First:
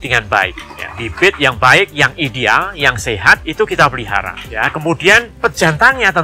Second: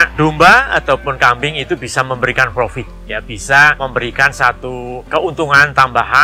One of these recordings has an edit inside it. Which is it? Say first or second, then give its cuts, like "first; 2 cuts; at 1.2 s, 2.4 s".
second; 2 cuts; at 3.8 s, 5.0 s